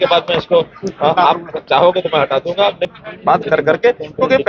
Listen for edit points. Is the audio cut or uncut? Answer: cut